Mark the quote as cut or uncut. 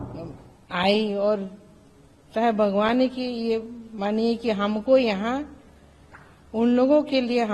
uncut